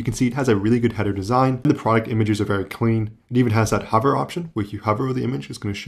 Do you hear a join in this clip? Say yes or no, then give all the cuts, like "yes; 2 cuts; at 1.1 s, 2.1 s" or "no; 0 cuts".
yes; 1 cut; at 1.6 s